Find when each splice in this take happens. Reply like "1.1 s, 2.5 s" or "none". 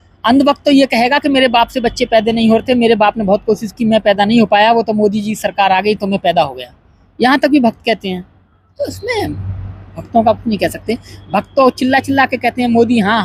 none